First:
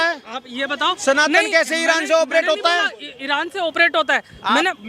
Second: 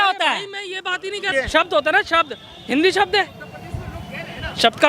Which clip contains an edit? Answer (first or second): second